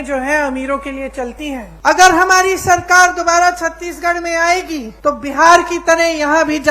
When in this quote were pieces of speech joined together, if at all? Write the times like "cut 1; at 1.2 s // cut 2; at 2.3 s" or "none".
cut 1; at 1.7 s // cut 2; at 4.9 s

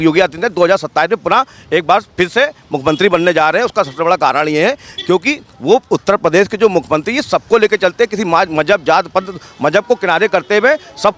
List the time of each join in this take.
none

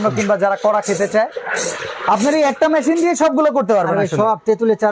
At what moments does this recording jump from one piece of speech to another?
none

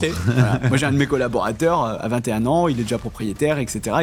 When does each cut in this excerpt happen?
none

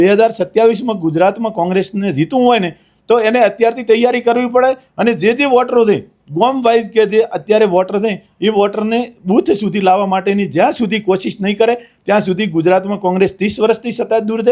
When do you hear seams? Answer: none

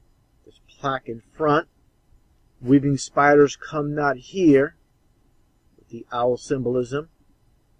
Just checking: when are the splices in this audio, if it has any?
cut 1; at 2.6 s

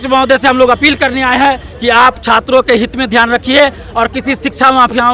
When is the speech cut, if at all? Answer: none

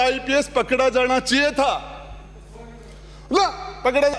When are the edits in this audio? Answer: none

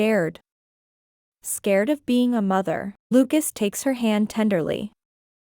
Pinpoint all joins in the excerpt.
cut 1; at 3.1 s

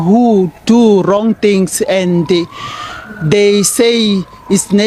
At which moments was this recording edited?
none

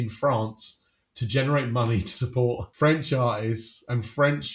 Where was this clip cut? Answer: cut 1; at 2.7 s

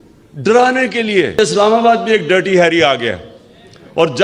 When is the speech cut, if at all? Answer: cut 1; at 1.4 s

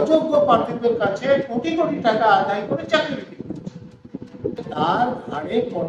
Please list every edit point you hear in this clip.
cut 1; at 4.6 s

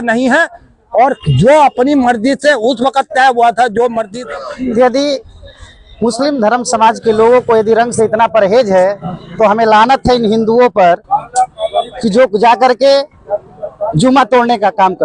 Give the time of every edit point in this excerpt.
cut 1; at 4.1 s

